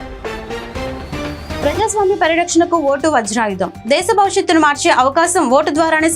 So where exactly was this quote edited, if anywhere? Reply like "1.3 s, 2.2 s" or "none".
1.6 s